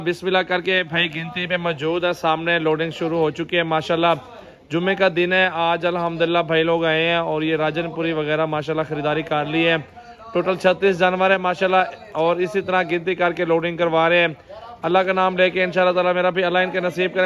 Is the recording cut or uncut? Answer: uncut